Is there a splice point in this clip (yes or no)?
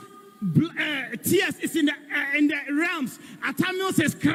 no